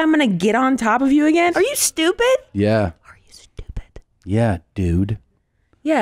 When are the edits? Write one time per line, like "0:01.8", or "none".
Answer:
0:01.5